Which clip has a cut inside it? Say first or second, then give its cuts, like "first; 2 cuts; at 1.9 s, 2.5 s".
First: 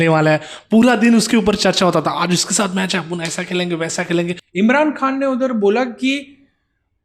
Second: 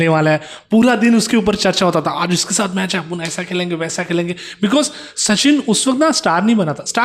first; 1 cut; at 4.4 s